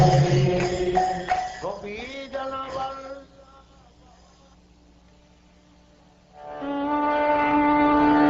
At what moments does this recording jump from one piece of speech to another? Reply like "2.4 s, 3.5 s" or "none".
7.4 s